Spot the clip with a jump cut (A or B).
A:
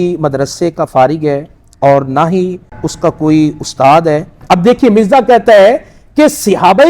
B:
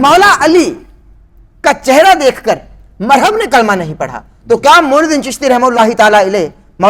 A